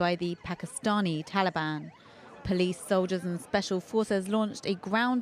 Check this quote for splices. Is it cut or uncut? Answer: cut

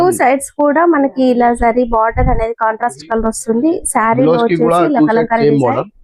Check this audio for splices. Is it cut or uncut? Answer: uncut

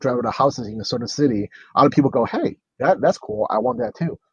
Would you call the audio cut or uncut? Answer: uncut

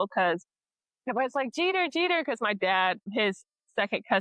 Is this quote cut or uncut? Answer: uncut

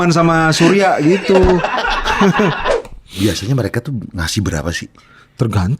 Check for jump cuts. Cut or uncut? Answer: cut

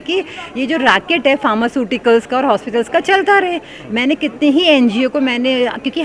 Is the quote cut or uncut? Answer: uncut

